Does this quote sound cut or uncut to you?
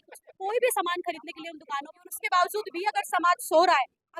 cut